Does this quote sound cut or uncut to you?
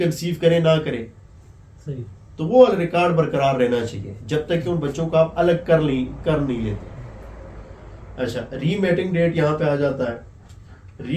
uncut